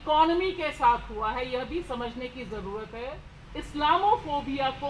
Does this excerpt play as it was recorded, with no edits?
no; 1 cut; at 3.3 s

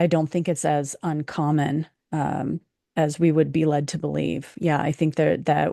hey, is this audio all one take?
yes; 0 cuts

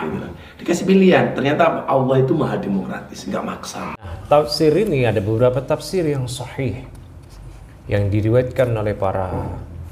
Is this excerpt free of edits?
no; 1 cut; at 4.0 s

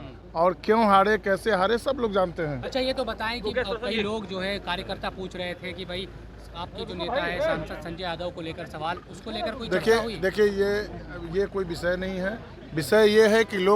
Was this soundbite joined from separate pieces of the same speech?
no; 0 cuts

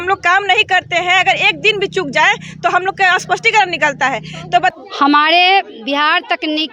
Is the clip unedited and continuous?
no; 1 cut; at 4.7 s

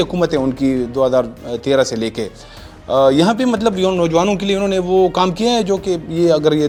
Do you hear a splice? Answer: no; 0 cuts

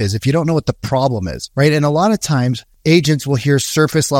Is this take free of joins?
no; 2 cuts; at 1.4 s, 2.7 s

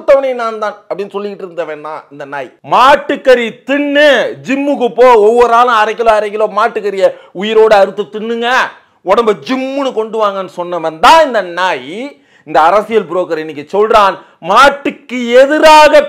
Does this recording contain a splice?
yes; 1 cut; at 2.5 s

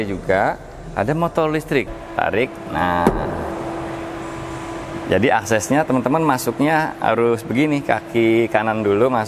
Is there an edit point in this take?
yes; 1 cut; at 1.9 s

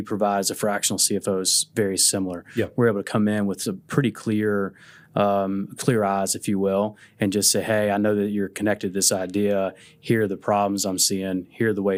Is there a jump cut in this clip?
no; 0 cuts

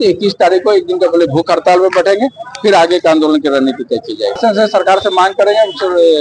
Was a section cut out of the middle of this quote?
yes; 1 cut; at 4.4 s

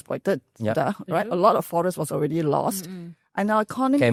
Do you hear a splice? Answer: no; 0 cuts

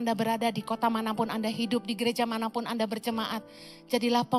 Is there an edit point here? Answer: no; 0 cuts

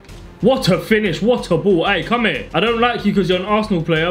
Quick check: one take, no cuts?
no; 1 cut; at 2.4 s

